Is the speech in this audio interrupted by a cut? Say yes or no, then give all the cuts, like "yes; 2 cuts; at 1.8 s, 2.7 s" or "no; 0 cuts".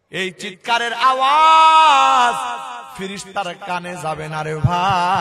no; 0 cuts